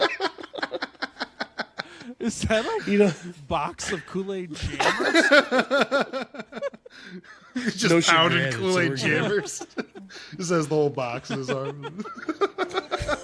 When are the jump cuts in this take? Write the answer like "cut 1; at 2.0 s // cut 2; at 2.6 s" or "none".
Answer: none